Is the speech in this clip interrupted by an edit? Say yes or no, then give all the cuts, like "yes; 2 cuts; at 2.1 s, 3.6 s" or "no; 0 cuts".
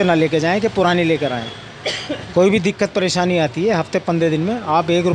no; 0 cuts